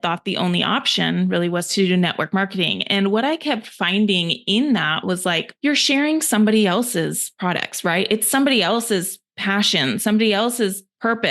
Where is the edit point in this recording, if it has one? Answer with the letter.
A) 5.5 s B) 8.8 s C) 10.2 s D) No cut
A